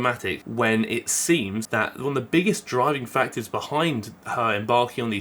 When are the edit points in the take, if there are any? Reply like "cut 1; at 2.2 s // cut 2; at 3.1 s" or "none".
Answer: cut 1; at 1.6 s